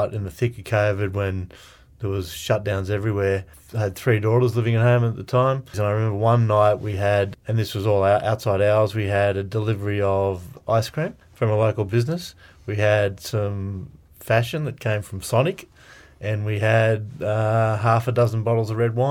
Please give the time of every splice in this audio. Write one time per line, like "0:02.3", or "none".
0:03.6
0:05.7
0:07.3
0:11.2